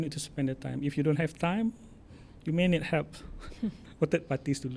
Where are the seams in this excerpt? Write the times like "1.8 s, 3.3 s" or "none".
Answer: none